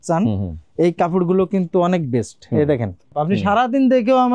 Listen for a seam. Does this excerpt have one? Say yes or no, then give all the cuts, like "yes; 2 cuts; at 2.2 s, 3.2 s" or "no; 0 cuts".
yes; 1 cut; at 3.1 s